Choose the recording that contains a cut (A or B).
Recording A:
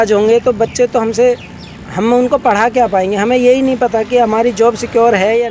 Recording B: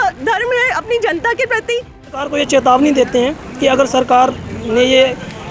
B